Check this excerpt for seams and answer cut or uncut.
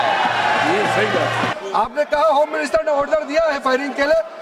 cut